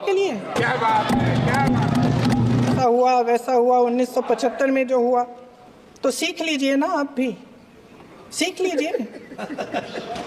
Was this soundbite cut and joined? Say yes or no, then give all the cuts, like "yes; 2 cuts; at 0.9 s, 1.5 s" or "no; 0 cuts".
yes; 1 cut; at 2.8 s